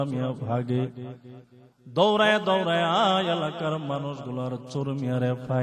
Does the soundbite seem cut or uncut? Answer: uncut